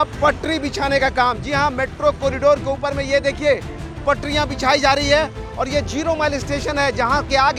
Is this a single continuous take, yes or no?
yes